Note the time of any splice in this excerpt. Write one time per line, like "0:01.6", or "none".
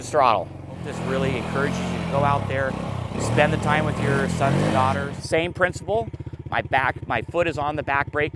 0:00.9
0:05.1